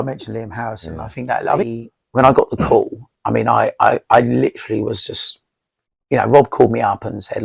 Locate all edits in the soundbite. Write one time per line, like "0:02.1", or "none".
0:01.7